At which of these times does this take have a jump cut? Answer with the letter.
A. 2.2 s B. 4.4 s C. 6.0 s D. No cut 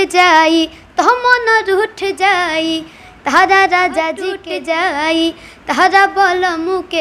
B